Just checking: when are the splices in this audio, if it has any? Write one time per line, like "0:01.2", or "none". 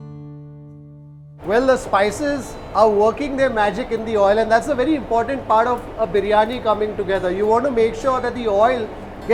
none